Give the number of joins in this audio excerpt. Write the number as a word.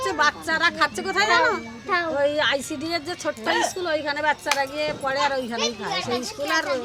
zero